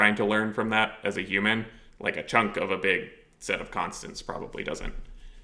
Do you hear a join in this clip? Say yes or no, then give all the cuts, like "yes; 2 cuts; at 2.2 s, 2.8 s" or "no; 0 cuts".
no; 0 cuts